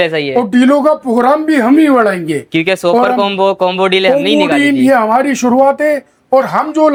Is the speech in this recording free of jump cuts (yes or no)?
yes